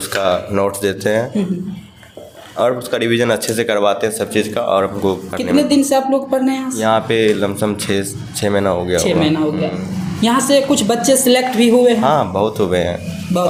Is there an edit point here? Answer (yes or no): no